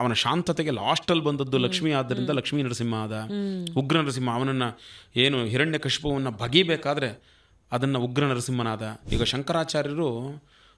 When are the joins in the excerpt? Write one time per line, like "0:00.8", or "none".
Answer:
0:09.0

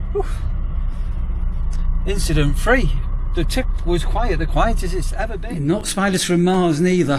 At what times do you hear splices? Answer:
0:05.3

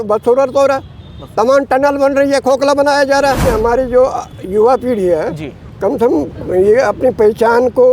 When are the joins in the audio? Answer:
0:03.4

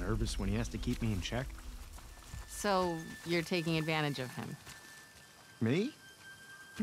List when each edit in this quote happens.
none

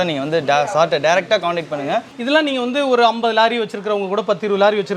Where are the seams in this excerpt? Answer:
0:02.1

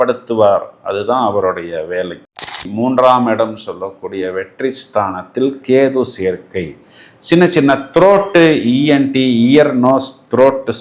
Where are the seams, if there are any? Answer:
0:02.2

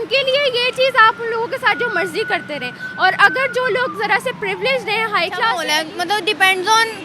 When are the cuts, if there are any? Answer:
0:05.6

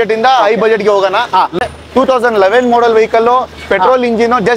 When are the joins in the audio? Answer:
0:01.6

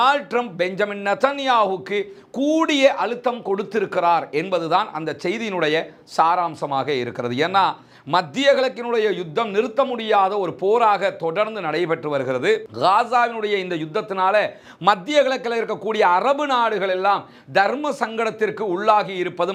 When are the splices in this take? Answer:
none

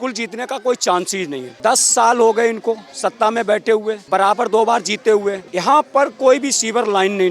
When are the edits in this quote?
0:01.4
0:04.0
0:05.5

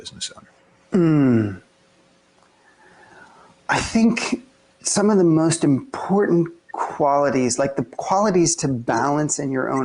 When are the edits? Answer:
0:02.7

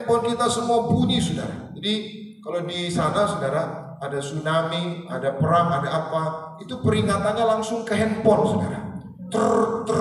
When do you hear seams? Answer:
none

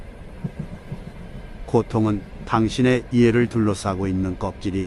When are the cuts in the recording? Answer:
0:01.2

